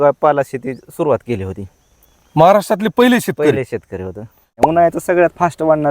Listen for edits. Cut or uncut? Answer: cut